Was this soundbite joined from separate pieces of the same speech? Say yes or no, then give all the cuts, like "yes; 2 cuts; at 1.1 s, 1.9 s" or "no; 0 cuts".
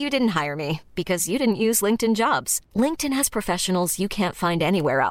no; 0 cuts